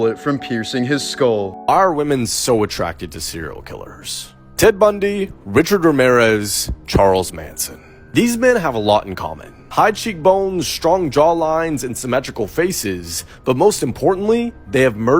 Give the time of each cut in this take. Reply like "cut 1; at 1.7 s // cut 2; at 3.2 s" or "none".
cut 1; at 1.7 s